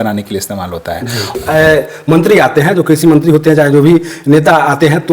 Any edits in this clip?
yes; 1 cut; at 1.4 s

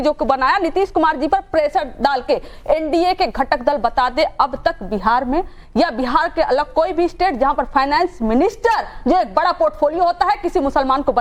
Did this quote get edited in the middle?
no; 0 cuts

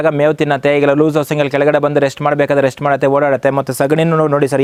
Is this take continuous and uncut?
yes; 0 cuts

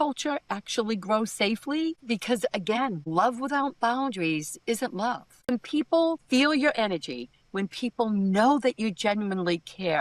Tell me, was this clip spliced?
yes; 1 cut; at 5.5 s

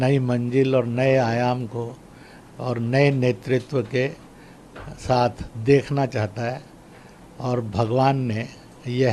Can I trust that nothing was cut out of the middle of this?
yes; 0 cuts

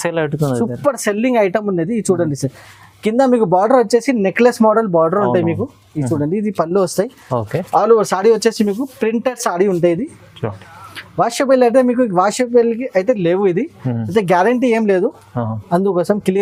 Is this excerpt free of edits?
yes; 0 cuts

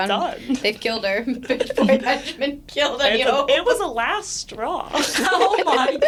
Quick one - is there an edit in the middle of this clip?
no; 0 cuts

